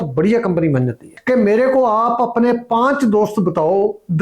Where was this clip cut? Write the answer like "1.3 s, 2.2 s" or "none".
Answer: 1.1 s